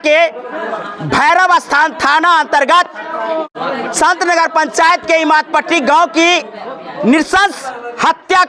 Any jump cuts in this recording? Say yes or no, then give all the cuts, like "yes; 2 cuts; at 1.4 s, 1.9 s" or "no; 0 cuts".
no; 0 cuts